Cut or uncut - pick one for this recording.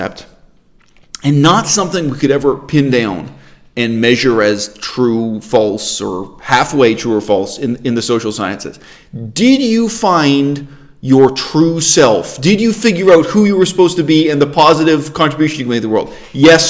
uncut